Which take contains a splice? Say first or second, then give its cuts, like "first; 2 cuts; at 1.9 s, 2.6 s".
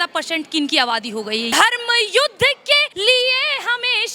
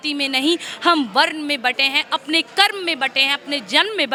first; 2 cuts; at 1.5 s, 2.9 s